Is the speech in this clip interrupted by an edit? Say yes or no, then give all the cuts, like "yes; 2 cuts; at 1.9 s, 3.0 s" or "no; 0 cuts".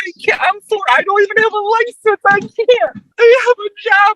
yes; 1 cut; at 3.0 s